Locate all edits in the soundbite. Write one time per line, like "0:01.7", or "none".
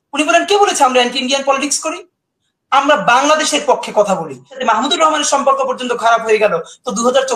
0:04.6